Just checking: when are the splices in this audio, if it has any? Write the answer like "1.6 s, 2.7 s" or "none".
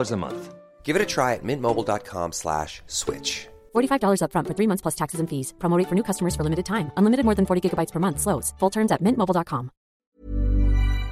10.0 s

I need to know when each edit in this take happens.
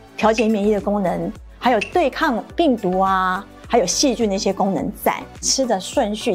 5.4 s

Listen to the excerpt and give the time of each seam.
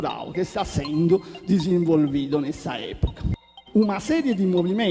3.2 s

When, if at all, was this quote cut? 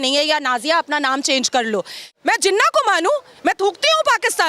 2.1 s

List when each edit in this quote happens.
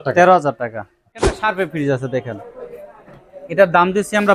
1.3 s

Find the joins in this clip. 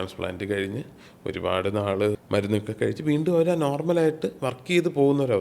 2.2 s

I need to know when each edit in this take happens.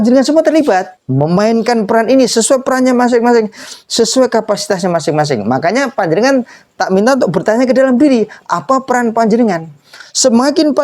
1.0 s

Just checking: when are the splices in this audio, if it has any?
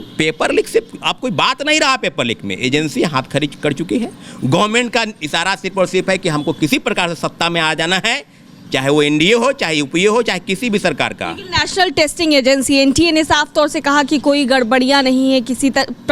none

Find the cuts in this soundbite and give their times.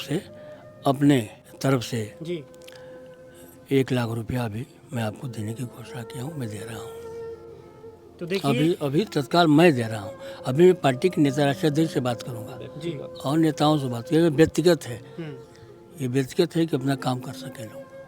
1.4 s

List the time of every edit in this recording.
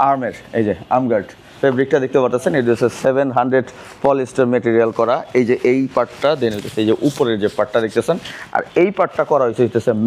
1.4 s

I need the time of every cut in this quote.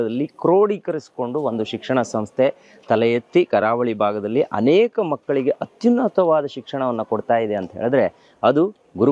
none

